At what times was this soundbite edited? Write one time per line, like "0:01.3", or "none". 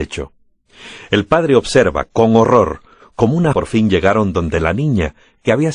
none